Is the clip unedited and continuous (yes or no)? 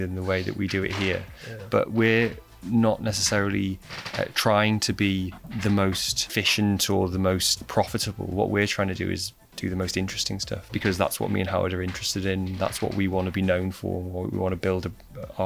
no